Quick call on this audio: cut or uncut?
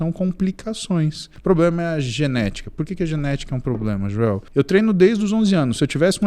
cut